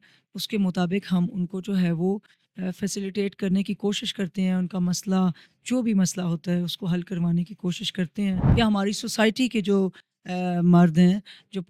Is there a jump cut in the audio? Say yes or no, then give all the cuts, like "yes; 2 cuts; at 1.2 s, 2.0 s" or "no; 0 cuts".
yes; 1 cut; at 8.5 s